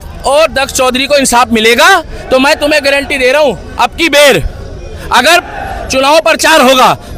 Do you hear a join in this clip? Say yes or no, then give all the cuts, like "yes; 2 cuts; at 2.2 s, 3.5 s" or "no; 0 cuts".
no; 0 cuts